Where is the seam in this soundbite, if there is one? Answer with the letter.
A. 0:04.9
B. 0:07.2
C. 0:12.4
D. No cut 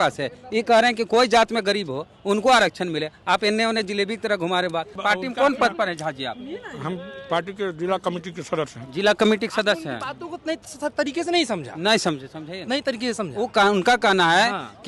A